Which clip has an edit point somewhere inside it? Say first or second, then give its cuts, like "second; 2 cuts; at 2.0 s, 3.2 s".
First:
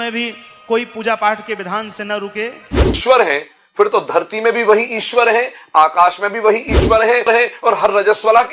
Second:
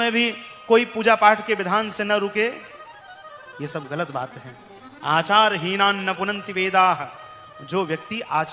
first; 2 cuts; at 2.9 s, 7.3 s